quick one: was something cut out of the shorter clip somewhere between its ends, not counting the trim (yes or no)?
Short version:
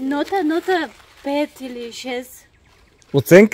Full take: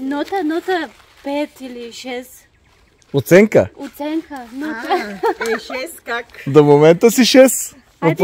no